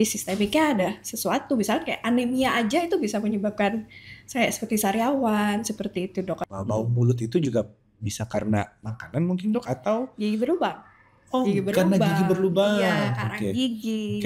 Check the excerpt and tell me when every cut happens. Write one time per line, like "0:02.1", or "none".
0:06.4